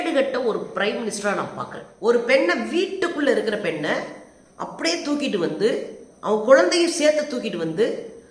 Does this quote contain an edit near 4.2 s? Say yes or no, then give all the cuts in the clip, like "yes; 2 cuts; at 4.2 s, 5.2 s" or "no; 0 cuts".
no; 1 cut; at 1.8 s